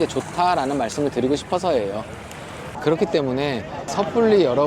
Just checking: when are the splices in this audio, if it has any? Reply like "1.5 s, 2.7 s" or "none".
2.6 s